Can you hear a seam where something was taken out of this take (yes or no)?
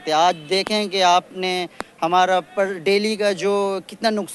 no